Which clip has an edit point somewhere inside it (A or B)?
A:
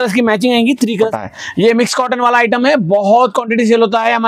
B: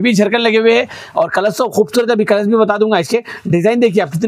A